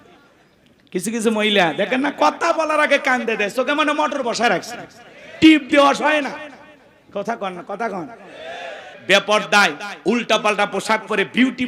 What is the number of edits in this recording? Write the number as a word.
one